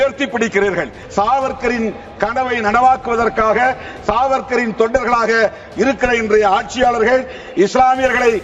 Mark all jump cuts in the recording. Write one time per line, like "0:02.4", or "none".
0:01.0